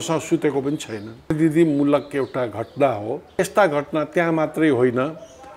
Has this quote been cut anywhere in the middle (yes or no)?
yes